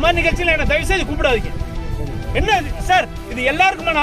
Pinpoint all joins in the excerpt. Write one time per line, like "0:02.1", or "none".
0:02.2